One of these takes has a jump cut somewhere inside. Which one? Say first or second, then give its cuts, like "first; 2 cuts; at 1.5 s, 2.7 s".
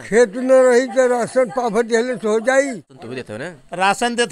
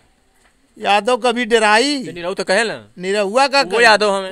first; 1 cut; at 2.9 s